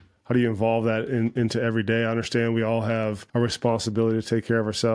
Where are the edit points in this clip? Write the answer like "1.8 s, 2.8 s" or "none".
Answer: 3.2 s